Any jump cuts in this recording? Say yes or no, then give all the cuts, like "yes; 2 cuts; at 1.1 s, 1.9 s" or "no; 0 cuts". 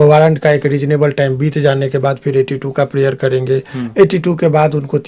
no; 0 cuts